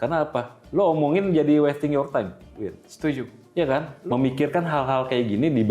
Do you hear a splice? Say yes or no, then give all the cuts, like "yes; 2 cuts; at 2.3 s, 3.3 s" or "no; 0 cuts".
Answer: yes; 1 cut; at 3.9 s